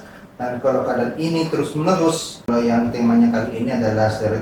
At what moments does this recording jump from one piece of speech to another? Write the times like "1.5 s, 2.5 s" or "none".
2.4 s